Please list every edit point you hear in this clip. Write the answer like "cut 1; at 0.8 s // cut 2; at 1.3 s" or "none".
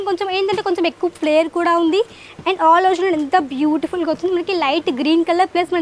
none

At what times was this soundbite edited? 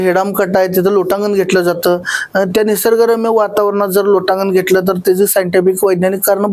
none

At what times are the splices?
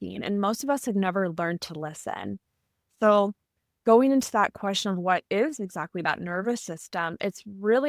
none

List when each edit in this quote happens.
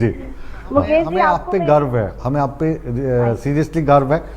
cut 1; at 1.4 s

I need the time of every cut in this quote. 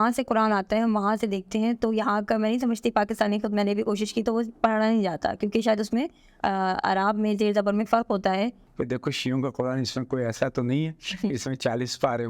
cut 1; at 8.7 s

